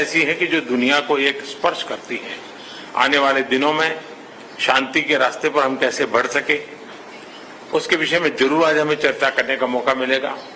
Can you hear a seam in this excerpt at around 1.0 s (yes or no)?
no